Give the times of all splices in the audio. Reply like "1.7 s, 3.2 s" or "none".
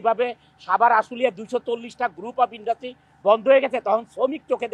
none